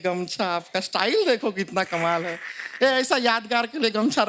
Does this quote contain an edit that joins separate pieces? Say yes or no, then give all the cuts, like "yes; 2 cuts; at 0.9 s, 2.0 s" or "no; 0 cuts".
no; 0 cuts